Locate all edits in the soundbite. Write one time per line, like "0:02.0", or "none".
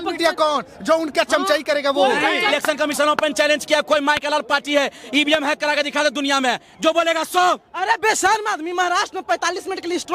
0:02.5